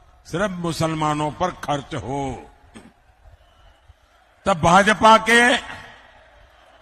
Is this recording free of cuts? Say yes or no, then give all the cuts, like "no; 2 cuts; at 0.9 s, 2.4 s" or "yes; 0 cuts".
yes; 0 cuts